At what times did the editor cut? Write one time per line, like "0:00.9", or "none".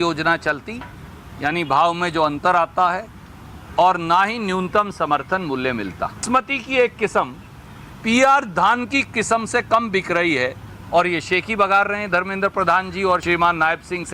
0:06.2
0:13.2